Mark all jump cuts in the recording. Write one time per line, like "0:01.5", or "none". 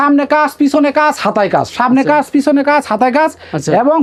none